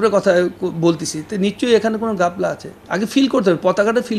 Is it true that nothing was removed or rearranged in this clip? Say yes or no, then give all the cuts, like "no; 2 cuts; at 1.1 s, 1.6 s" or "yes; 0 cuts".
no; 1 cut; at 2.7 s